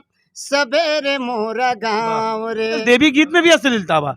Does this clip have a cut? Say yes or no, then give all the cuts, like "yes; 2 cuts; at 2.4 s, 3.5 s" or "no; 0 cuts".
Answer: yes; 1 cut; at 2.8 s